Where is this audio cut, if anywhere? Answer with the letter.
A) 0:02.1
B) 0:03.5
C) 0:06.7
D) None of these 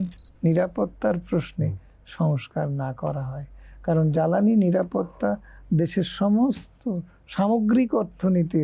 D